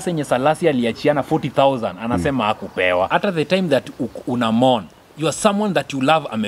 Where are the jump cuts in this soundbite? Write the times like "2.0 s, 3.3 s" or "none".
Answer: 3.1 s